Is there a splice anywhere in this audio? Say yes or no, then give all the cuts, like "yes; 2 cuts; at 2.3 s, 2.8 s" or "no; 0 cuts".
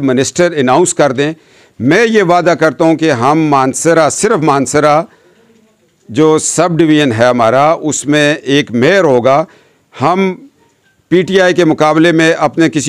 no; 0 cuts